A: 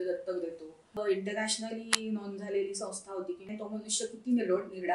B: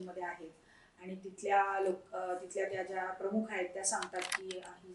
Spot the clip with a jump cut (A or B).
A